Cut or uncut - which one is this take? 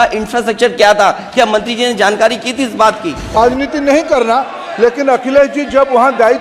cut